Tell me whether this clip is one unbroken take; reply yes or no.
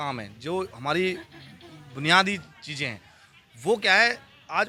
yes